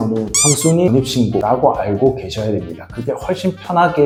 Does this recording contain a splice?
no; 0 cuts

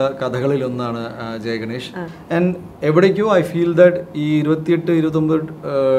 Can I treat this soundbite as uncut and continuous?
yes; 0 cuts

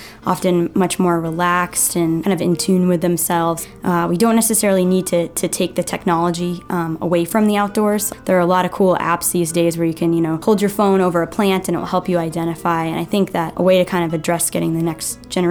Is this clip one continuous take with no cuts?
no; 5 cuts; at 2.2 s, 3.6 s, 8.1 s, 10.4 s, 13.5 s

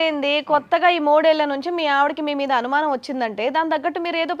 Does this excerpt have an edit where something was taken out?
no; 0 cuts

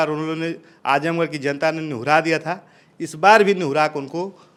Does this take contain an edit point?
no; 0 cuts

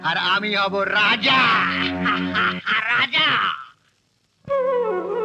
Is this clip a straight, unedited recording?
yes; 0 cuts

